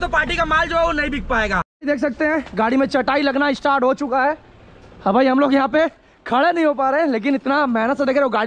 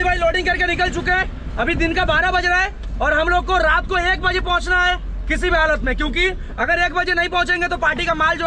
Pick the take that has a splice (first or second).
first